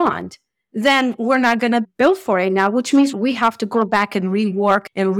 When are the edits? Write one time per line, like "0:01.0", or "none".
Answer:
0:03.1